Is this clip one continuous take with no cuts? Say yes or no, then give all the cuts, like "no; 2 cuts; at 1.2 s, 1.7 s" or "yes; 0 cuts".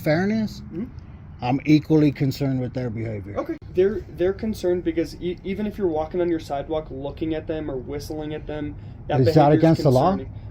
no; 1 cut; at 3.7 s